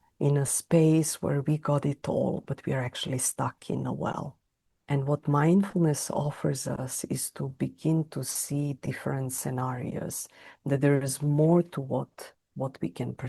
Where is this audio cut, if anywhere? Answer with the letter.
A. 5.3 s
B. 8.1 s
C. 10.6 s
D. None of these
D